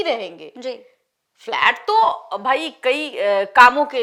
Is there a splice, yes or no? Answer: no